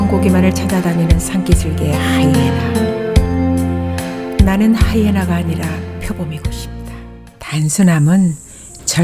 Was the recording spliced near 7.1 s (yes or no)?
yes